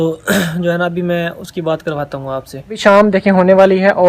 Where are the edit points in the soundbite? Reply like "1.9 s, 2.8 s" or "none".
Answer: 2.8 s